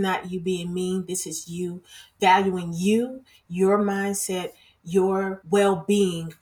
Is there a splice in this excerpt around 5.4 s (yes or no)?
yes